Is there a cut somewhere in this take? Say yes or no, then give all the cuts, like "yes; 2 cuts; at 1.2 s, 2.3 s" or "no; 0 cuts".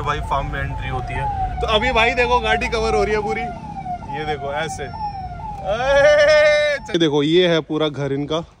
yes; 2 cuts; at 1.5 s, 6.8 s